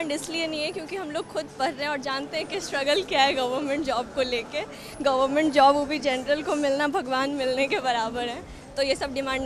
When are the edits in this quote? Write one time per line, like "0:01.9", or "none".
none